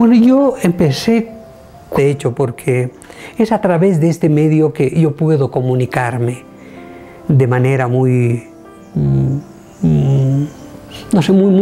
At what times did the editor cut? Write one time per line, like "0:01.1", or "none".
none